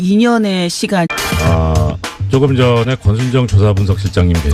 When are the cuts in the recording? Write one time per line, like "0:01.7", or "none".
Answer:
none

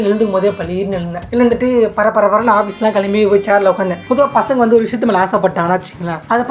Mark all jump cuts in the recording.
0:01.2
0:04.0

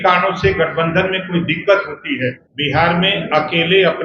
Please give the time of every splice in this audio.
0:02.5

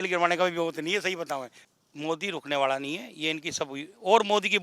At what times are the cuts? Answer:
0:01.6

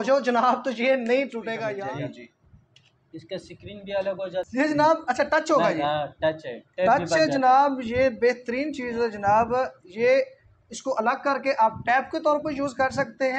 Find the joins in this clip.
0:01.8
0:04.5

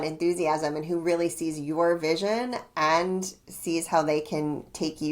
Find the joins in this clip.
none

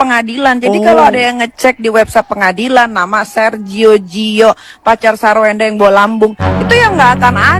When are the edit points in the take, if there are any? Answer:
none

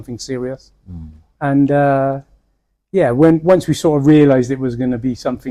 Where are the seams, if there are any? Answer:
none

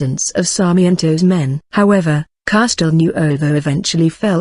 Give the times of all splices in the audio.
0:02.0

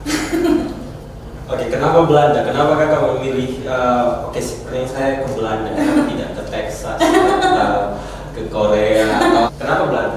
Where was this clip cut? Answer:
none

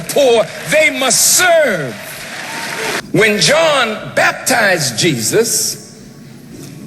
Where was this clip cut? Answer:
0:03.0

